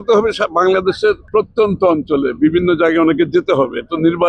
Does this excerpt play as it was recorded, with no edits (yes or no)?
no